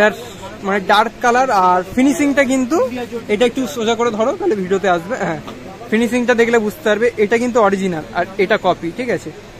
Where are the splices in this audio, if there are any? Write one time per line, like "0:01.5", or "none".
none